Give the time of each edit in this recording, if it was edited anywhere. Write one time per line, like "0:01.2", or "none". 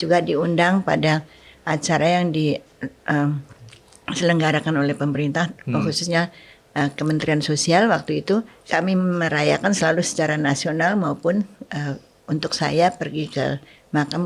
0:08.6